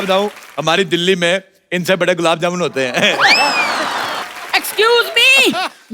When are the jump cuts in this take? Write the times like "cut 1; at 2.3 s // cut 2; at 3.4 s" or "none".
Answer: cut 1; at 4.2 s

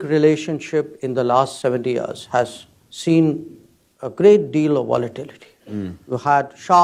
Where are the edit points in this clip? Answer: none

